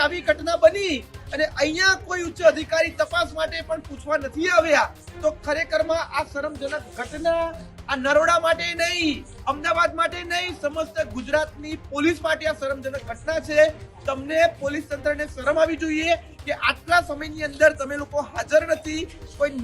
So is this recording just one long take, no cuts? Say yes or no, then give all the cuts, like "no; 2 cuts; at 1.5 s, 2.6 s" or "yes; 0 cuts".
yes; 0 cuts